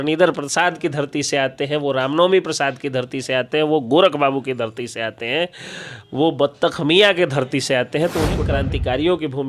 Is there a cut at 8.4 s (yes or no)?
yes